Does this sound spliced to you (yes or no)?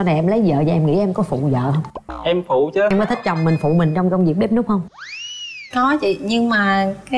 yes